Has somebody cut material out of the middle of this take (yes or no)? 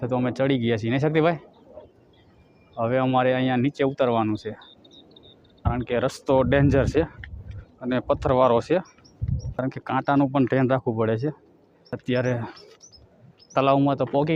yes